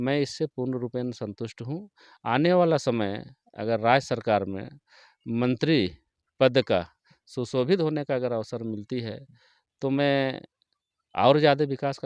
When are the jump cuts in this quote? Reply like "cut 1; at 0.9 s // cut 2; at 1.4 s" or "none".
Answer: none